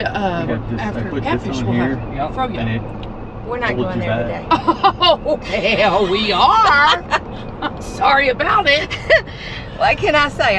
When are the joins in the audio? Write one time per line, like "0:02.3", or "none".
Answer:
none